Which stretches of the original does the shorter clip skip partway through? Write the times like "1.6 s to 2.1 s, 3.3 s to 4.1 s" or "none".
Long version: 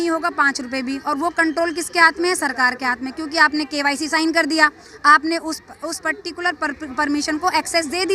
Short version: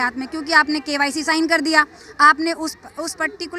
none